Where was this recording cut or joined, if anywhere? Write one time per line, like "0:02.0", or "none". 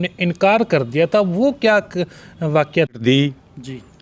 0:02.9